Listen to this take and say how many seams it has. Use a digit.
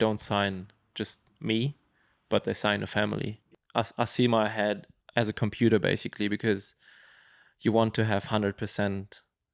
2